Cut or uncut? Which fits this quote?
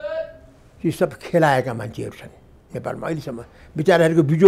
uncut